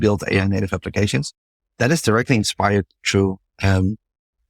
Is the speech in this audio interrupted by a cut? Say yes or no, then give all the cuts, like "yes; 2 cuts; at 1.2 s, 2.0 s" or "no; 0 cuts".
no; 0 cuts